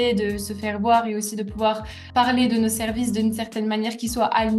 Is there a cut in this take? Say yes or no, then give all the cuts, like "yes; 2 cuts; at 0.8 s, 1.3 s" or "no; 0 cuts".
no; 0 cuts